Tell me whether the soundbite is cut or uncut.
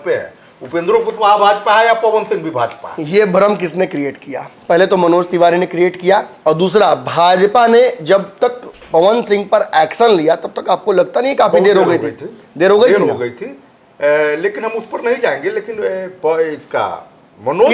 uncut